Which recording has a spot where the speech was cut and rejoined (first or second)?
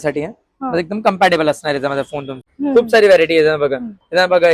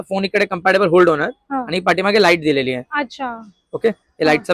first